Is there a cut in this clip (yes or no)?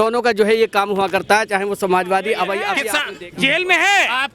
yes